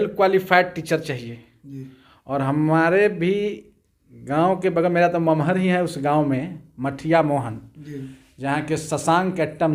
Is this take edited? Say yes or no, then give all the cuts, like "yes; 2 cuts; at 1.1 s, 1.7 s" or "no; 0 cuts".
no; 0 cuts